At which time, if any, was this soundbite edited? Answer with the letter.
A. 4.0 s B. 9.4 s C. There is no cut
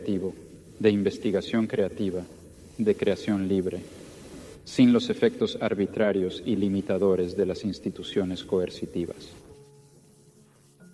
C